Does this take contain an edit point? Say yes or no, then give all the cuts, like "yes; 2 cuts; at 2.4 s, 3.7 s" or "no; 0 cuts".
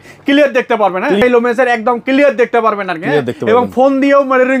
yes; 1 cut; at 1.2 s